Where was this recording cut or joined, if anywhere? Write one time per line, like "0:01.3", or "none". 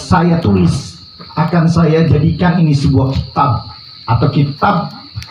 none